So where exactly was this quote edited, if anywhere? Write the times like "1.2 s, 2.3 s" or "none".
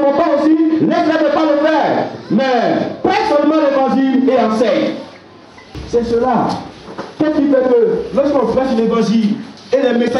5.8 s